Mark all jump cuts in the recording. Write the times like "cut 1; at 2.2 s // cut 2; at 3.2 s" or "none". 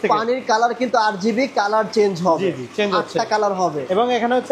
none